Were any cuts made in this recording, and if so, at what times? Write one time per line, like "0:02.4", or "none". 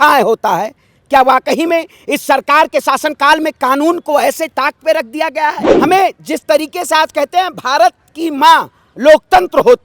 0:05.7